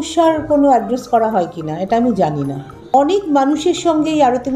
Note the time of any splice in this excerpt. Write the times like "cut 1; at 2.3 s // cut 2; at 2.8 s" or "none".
cut 1; at 2.9 s